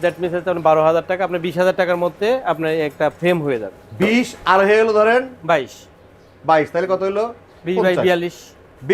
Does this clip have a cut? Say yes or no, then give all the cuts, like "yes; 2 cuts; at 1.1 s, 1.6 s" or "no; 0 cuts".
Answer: no; 0 cuts